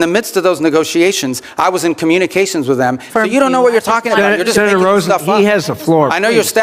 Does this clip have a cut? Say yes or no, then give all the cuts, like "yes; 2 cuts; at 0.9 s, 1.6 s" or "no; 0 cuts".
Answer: yes; 1 cut; at 3.0 s